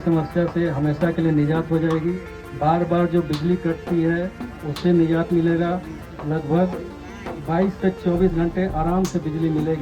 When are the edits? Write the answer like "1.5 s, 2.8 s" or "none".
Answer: none